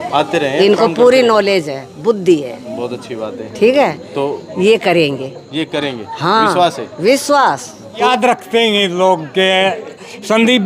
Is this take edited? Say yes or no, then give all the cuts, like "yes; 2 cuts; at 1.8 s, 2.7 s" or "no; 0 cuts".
yes; 1 cut; at 8.0 s